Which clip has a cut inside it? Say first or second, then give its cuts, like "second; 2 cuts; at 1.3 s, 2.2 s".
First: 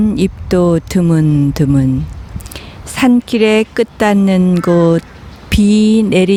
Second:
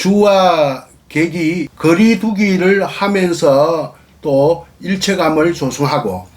second; 1 cut; at 1.7 s